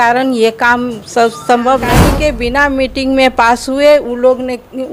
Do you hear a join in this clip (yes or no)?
yes